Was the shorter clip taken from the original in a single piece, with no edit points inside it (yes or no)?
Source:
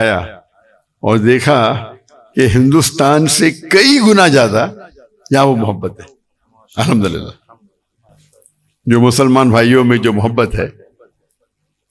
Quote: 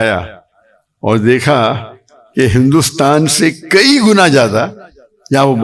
yes